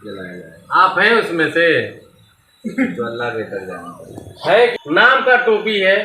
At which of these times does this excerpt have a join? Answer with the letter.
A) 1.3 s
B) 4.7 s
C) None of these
B